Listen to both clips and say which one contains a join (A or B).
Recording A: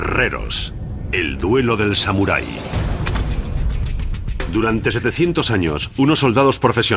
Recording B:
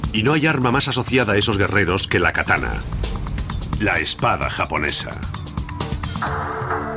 A